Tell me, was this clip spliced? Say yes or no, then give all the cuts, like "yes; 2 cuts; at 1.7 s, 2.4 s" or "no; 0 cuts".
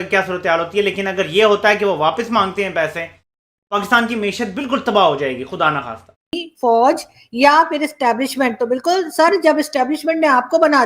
yes; 1 cut; at 6.5 s